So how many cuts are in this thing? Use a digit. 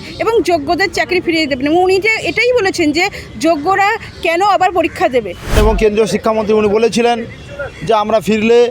1